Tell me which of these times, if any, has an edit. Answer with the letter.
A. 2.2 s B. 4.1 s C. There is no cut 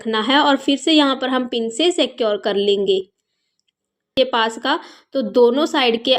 B